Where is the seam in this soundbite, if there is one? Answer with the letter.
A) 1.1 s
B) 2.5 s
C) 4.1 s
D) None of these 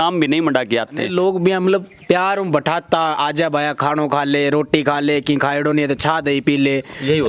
A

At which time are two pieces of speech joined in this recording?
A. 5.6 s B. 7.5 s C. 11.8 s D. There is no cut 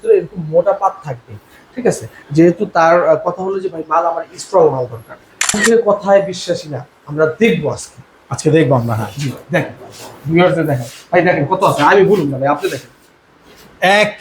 A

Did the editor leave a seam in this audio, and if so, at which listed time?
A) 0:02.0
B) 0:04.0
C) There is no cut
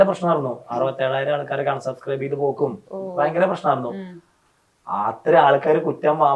C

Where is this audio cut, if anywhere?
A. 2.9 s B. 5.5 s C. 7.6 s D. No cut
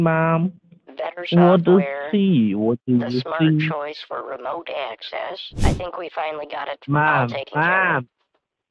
B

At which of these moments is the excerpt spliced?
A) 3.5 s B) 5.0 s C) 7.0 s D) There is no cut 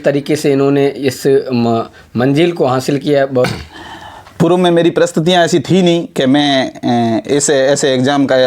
A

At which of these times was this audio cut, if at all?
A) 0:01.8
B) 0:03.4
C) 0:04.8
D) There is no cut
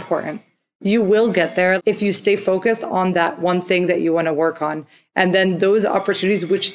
A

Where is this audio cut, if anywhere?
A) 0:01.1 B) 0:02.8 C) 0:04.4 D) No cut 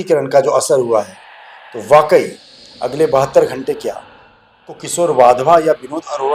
C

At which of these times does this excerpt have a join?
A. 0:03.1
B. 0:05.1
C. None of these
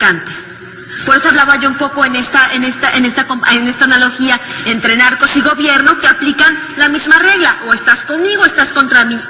C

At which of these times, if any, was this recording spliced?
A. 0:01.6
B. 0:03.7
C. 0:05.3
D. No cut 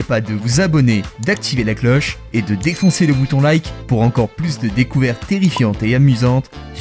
D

